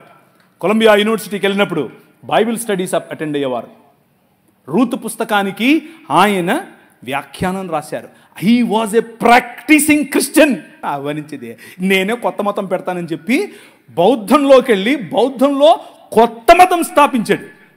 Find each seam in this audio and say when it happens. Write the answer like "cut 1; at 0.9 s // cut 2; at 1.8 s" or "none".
cut 1; at 10.7 s